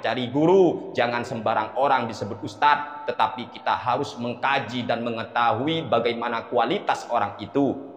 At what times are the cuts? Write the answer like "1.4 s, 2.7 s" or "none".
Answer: none